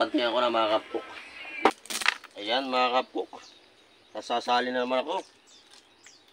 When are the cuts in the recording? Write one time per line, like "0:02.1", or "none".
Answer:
0:01.7

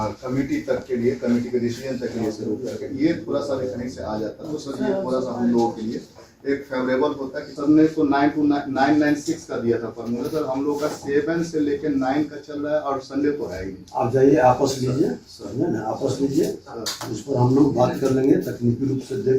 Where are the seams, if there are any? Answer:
0:07.5

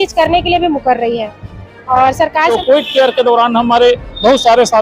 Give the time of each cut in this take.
0:02.5

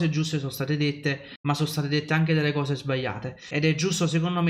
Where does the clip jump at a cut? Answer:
0:01.3
0:03.5

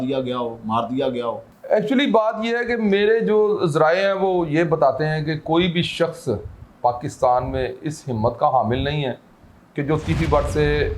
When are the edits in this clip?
0:01.5

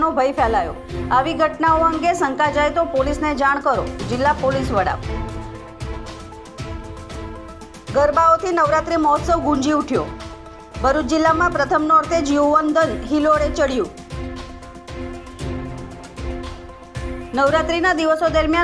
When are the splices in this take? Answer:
none

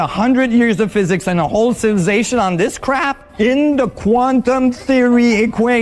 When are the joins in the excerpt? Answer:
0:03.2

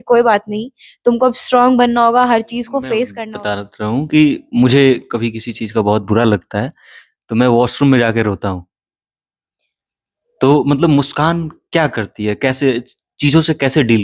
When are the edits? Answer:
0:03.3

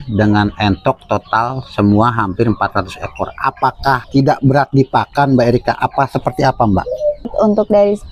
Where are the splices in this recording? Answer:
0:04.0
0:07.3

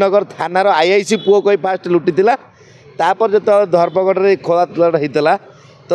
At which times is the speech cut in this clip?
none

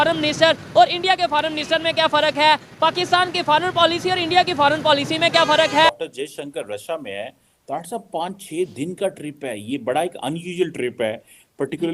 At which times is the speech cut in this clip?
none

